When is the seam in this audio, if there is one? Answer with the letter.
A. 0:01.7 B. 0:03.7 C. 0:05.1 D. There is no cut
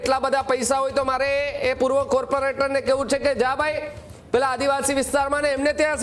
D